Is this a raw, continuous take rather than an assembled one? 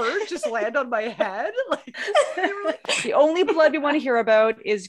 no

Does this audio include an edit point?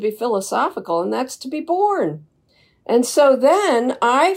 no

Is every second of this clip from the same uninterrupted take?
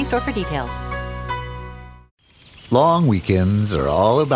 no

